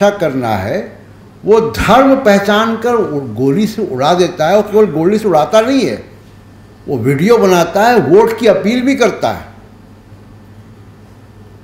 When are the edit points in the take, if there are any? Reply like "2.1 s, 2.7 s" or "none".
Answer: none